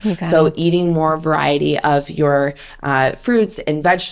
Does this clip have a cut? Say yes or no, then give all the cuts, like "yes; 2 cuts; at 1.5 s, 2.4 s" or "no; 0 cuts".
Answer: no; 0 cuts